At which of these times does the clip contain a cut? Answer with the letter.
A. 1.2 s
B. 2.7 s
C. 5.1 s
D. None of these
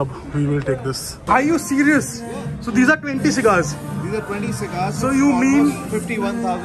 A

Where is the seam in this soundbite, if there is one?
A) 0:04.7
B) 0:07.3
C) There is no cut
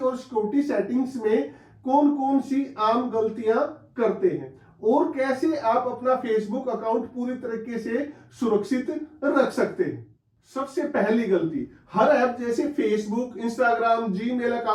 C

